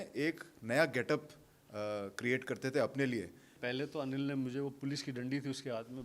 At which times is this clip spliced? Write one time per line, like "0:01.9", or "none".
0:03.5

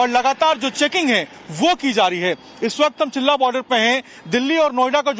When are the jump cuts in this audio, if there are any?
none

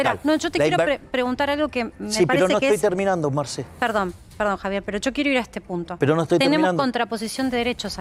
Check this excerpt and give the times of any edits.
none

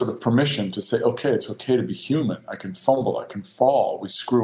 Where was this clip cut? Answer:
none

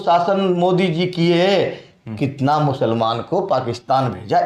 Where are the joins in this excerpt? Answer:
none

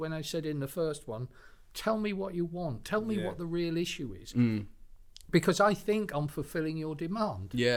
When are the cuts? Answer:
none

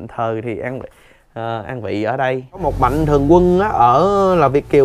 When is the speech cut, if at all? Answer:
0:02.7

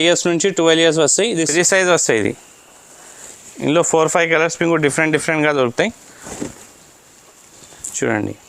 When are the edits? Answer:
0:01.3

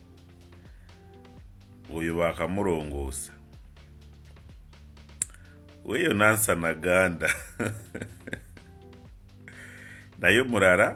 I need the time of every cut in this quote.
none

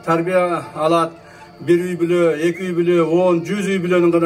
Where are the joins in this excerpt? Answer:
none

